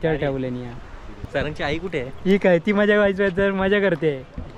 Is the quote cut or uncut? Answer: cut